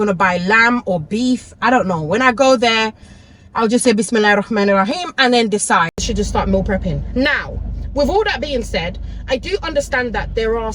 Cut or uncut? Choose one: cut